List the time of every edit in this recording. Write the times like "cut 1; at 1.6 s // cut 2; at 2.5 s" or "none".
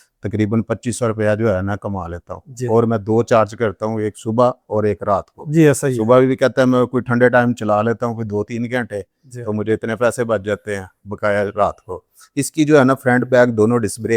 none